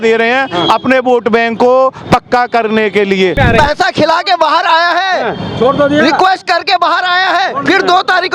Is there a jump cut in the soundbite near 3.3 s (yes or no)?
yes